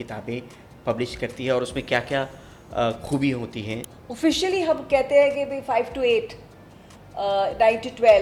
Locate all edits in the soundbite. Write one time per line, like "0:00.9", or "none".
0:03.9